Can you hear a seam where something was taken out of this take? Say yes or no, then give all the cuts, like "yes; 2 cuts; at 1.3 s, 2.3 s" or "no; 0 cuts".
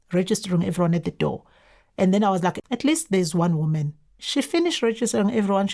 yes; 2 cuts; at 2.6 s, 4.2 s